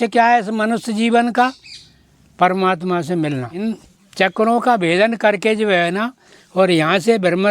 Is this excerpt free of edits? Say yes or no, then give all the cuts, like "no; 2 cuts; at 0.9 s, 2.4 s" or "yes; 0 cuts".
no; 1 cut; at 3.6 s